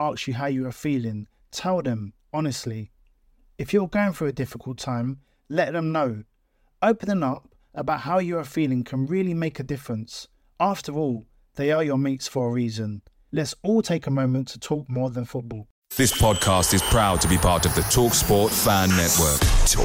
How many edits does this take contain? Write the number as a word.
one